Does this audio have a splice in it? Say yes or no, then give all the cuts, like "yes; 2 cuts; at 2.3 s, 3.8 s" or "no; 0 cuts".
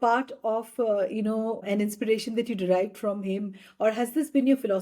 yes; 1 cut; at 1.6 s